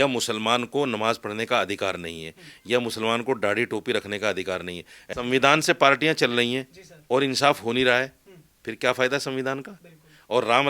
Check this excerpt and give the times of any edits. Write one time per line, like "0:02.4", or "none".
0:05.0